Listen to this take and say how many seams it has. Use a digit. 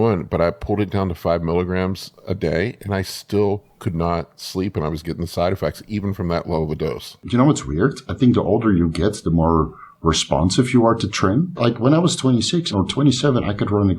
3